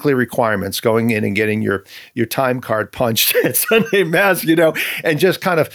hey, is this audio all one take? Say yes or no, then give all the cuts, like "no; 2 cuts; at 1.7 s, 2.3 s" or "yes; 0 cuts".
yes; 0 cuts